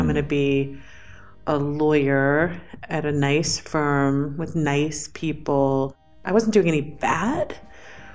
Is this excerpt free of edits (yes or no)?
no